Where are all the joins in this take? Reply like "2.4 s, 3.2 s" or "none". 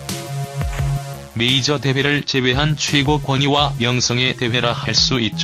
1.1 s